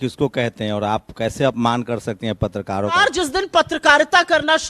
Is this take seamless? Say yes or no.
no